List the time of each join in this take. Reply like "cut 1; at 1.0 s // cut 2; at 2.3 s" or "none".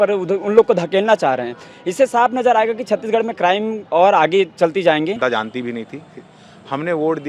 cut 1; at 5.2 s

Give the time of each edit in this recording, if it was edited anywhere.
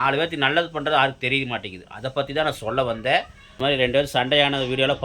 cut 1; at 3.4 s

